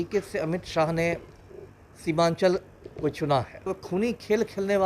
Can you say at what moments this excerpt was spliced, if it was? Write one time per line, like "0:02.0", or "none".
0:03.8